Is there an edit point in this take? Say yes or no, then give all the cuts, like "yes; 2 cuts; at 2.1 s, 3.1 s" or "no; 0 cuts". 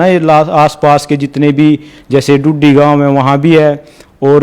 no; 0 cuts